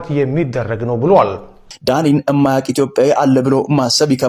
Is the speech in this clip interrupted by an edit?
yes; 1 cut; at 1.6 s

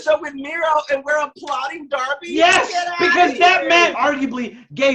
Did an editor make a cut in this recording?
yes; 1 cut; at 3.9 s

